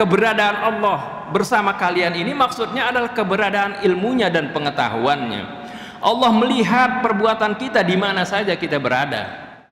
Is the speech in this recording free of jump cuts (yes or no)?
yes